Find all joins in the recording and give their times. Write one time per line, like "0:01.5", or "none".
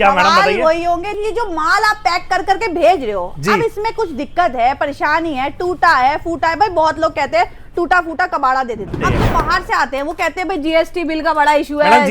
0:01.1
0:09.0